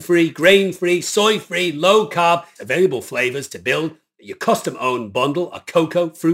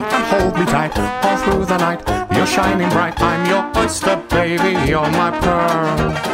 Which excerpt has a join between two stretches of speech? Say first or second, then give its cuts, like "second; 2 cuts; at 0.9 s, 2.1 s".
first; 1 cut; at 2.6 s